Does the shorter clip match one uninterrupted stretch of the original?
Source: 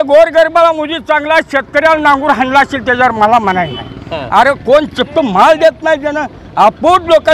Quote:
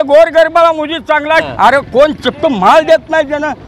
no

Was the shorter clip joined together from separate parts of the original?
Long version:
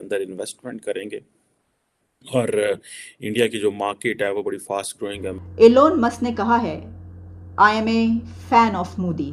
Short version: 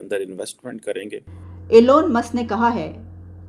yes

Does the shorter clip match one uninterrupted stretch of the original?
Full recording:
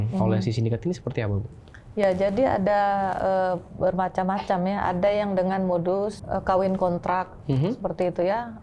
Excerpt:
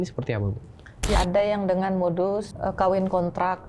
no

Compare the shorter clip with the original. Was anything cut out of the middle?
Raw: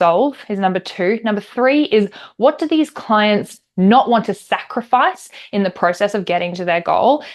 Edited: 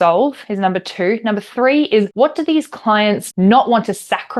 yes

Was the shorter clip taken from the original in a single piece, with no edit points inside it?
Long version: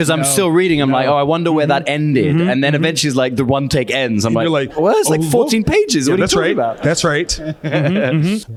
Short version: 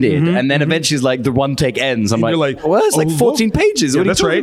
yes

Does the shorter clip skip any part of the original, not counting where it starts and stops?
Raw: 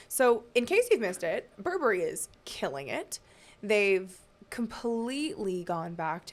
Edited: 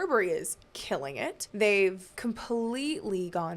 yes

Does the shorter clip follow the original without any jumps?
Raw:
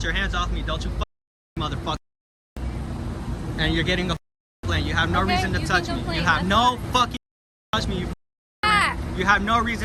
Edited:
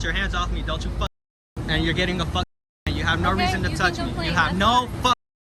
no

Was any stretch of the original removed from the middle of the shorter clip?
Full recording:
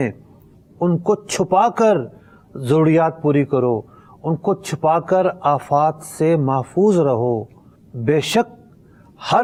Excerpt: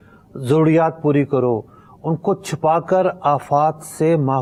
no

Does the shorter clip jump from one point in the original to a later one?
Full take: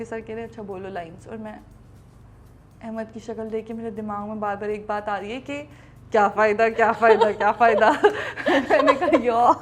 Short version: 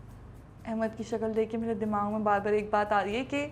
no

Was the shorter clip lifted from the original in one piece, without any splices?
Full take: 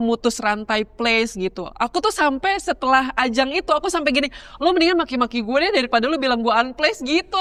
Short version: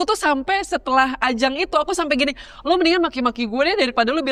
yes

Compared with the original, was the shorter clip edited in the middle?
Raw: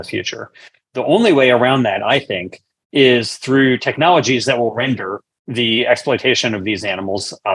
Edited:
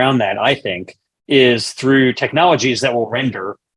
no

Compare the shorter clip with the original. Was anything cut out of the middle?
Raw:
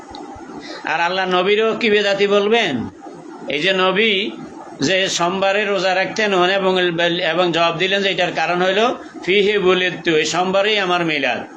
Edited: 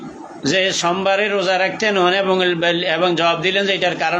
no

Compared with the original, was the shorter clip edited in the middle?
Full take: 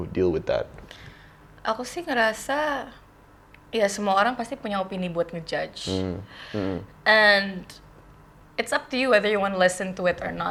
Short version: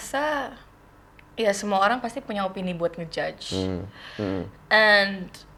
no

